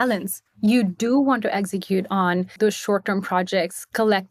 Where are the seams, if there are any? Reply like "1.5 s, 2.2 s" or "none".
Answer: 2.5 s

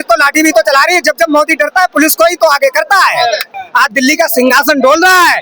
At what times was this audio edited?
3.6 s

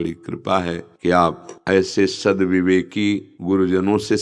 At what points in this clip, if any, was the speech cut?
0.9 s, 1.5 s, 3.3 s

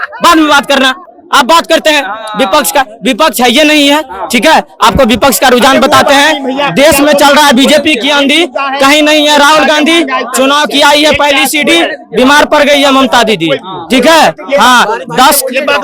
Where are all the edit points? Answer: none

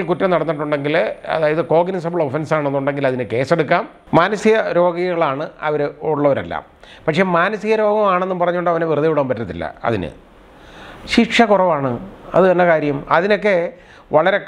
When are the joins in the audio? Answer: 4.0 s

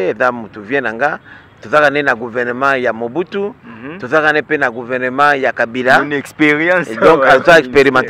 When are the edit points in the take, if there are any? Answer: none

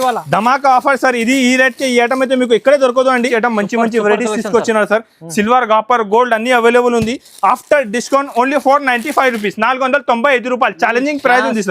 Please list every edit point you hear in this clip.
3.2 s

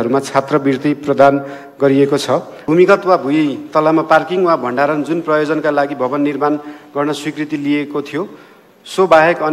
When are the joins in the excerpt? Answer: 2.5 s

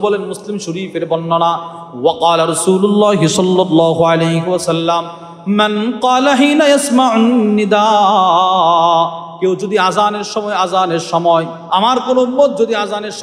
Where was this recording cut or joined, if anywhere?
11.6 s

